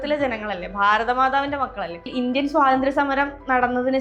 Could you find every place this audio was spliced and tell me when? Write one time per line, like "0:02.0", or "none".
0:02.1